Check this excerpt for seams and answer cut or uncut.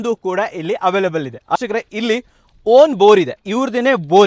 cut